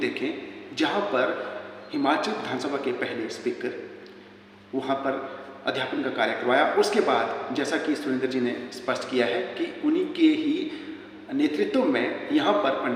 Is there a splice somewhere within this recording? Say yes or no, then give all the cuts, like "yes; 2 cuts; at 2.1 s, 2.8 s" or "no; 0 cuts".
no; 0 cuts